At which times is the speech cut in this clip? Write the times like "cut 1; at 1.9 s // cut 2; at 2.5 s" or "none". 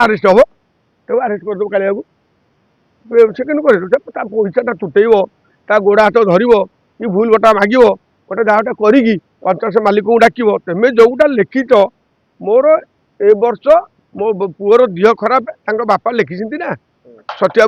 none